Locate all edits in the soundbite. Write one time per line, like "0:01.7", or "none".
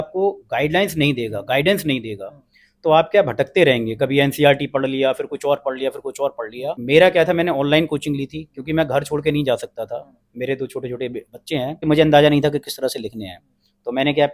0:06.8
0:11.8